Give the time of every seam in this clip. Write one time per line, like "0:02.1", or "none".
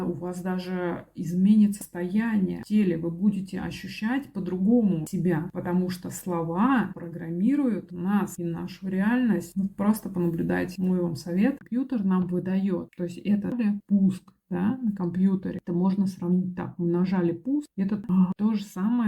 0:11.6
0:13.5
0:18.1